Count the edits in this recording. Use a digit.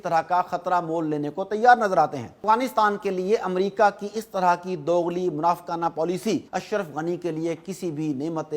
2